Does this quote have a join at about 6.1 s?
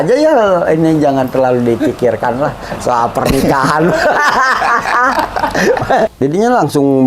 yes; 1 cut; at 6.1 s

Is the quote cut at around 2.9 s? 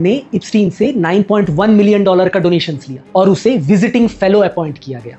no; 0 cuts

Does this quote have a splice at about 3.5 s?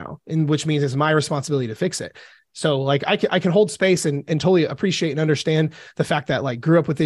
no; 0 cuts

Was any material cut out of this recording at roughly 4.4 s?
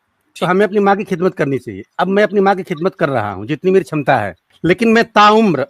yes; 1 cut; at 4.4 s

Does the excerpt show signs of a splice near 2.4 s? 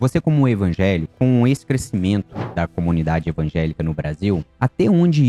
yes; 2 cuts; at 1.1 s, 2.4 s

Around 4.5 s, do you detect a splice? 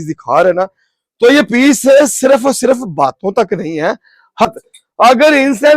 yes; 1 cut; at 4.5 s

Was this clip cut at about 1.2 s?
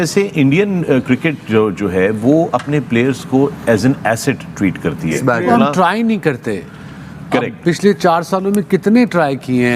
no; 1 cut; at 5.2 s

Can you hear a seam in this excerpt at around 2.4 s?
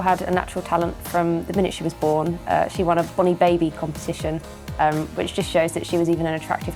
no; 0 cuts

